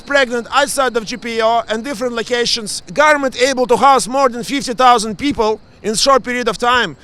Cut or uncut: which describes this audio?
cut